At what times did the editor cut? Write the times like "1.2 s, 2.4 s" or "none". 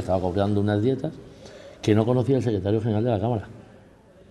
none